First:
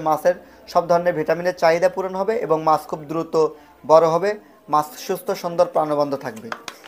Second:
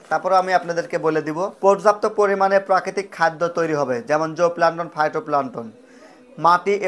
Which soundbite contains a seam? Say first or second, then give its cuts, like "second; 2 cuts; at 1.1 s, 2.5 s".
second; 1 cut; at 1.5 s